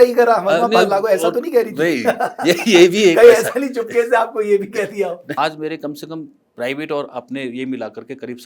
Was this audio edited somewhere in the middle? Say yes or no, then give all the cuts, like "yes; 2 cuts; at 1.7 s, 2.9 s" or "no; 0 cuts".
yes; 1 cut; at 5.4 s